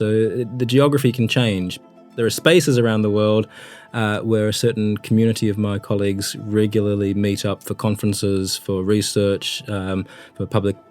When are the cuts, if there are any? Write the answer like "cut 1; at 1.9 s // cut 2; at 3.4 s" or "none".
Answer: cut 1; at 2.0 s